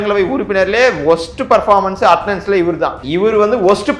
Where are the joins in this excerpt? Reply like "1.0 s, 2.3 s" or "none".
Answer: 3.0 s